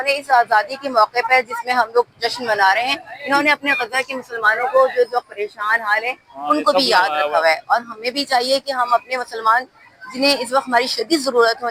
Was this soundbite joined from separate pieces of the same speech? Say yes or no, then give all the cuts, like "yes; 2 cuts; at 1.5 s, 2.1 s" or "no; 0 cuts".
no; 0 cuts